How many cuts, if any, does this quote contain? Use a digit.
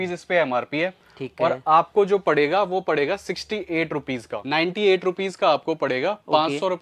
1